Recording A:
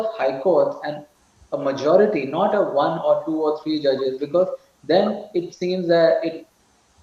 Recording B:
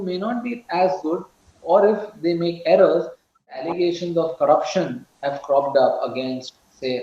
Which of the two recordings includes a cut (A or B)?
B